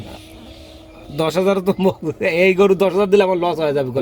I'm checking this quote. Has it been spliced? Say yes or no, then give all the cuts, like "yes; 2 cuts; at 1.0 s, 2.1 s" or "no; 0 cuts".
no; 0 cuts